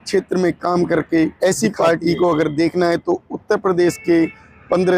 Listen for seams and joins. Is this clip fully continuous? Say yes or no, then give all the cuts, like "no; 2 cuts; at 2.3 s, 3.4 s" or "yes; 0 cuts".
no; 1 cut; at 1.3 s